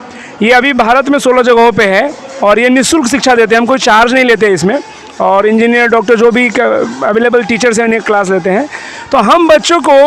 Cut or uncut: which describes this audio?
uncut